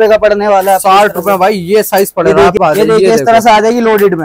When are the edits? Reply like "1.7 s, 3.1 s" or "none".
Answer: 2.6 s